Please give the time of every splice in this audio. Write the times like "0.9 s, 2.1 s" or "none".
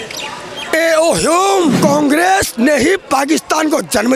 1.8 s